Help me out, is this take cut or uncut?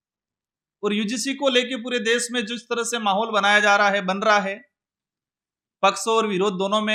uncut